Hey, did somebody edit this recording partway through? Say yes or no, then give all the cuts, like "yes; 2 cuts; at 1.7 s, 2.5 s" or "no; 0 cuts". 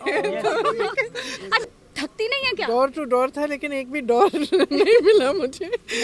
yes; 1 cut; at 1.6 s